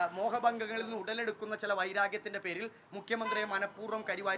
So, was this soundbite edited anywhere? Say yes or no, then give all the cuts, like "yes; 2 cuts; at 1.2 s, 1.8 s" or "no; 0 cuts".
no; 0 cuts